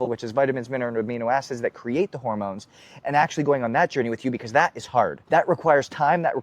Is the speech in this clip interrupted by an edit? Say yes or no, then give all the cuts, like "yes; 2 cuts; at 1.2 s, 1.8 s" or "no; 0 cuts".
yes; 1 cut; at 5.2 s